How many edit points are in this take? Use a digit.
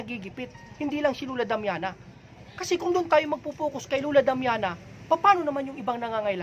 1